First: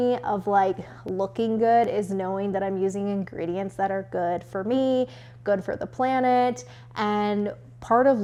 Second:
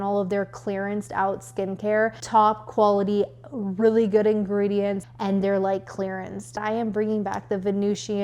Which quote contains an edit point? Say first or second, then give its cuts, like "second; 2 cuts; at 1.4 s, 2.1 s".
second; 3 cuts; at 2.2 s, 5.1 s, 6.6 s